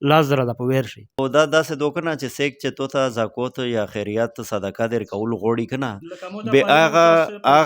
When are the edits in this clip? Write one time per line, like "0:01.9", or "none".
0:01.2